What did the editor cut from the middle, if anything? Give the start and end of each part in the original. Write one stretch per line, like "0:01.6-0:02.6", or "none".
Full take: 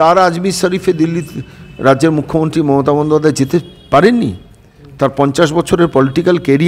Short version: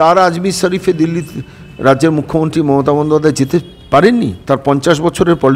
0:04.4-0:04.9